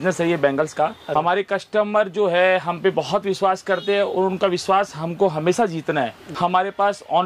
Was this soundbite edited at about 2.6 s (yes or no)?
no